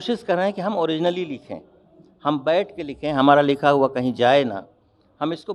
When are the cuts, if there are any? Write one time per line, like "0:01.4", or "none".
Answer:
none